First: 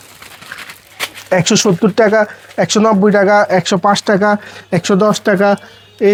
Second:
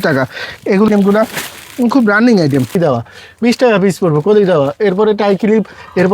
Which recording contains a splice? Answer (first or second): second